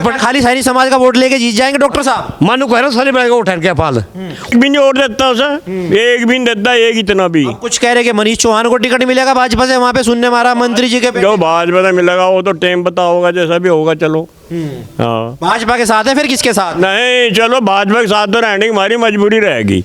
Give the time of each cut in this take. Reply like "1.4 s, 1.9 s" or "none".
4.5 s